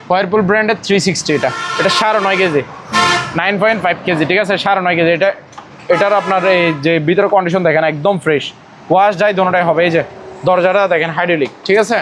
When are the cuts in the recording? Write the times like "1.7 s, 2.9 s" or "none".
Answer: none